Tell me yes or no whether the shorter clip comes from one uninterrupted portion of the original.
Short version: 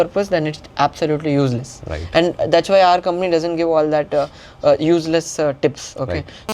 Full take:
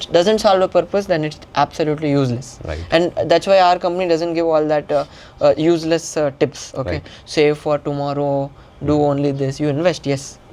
yes